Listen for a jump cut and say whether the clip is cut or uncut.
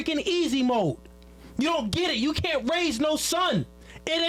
uncut